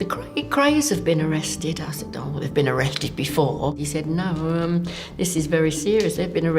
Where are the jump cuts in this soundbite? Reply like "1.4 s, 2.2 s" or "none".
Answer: 3.8 s